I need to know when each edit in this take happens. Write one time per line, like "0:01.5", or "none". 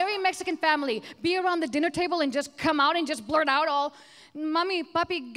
none